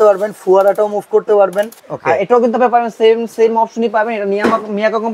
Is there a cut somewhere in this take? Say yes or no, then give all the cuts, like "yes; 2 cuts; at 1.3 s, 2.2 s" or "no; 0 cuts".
yes; 1 cut; at 1.8 s